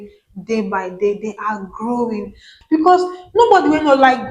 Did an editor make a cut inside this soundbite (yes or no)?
yes